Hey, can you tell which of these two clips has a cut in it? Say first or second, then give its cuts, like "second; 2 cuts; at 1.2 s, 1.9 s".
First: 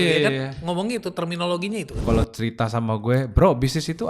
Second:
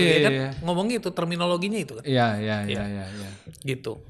first; 1 cut; at 2.0 s